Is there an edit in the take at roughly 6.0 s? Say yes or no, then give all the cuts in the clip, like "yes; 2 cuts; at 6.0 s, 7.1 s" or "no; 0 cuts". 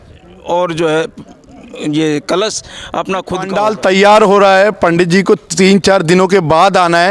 no; 1 cut; at 3.5 s